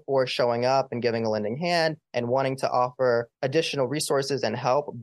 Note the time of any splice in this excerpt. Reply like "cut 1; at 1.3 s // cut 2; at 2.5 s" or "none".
cut 1; at 2.0 s // cut 2; at 3.3 s